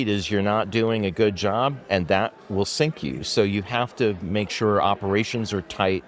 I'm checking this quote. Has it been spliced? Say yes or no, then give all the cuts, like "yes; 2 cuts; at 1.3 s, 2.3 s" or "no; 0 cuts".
no; 0 cuts